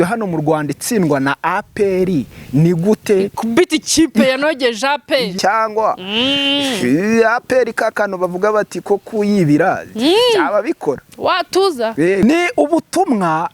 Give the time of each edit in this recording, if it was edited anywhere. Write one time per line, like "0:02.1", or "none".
0:05.3
0:12.2